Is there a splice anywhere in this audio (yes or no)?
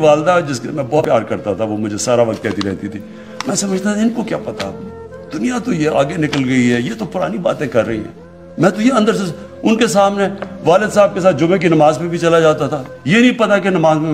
yes